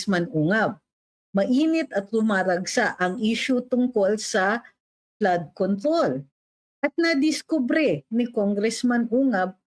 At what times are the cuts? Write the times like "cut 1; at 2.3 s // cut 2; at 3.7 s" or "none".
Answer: none